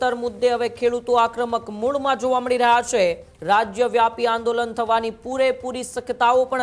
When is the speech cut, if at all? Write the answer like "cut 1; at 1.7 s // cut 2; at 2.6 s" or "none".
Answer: cut 1; at 3.3 s